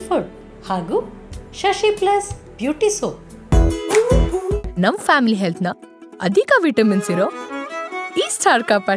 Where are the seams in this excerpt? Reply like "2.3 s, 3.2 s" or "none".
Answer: 3.3 s